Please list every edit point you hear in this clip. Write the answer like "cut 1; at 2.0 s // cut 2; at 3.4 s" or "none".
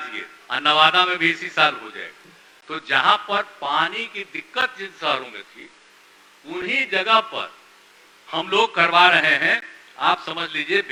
none